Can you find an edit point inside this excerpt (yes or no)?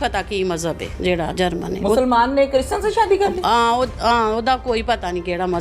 no